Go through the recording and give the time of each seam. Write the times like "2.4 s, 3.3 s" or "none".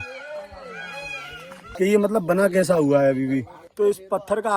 1.6 s, 3.6 s